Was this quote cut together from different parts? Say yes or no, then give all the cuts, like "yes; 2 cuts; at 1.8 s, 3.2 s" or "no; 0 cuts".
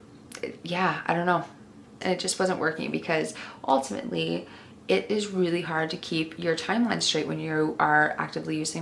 yes; 1 cut; at 2.0 s